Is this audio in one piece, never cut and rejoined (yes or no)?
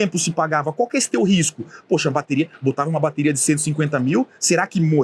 yes